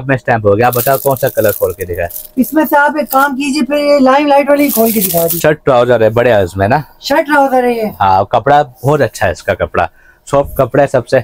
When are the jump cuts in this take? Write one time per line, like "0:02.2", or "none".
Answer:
0:05.4